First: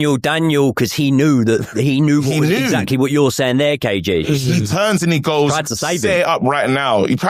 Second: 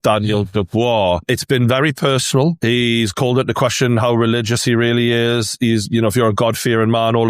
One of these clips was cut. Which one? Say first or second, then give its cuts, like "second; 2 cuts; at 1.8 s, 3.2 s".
second; 2 cuts; at 1.2 s, 2.6 s